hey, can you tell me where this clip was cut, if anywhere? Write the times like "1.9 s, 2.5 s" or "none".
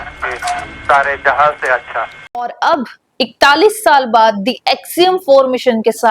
2.4 s